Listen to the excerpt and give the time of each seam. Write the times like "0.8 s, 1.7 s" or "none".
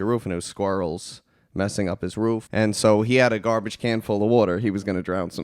2.5 s